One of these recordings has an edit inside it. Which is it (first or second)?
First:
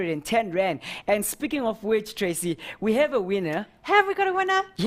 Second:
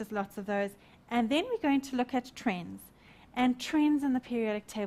second